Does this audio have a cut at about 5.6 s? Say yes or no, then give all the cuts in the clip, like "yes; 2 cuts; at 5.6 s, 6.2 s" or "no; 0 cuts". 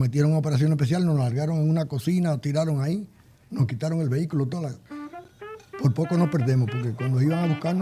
no; 0 cuts